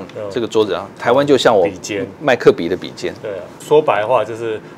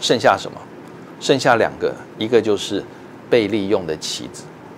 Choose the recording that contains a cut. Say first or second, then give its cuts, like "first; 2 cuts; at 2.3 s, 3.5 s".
first; 1 cut; at 3.6 s